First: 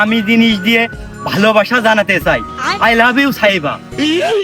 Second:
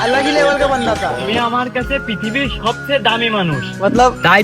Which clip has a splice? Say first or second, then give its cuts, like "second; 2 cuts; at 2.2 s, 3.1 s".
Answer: second; 1 cut; at 1.2 s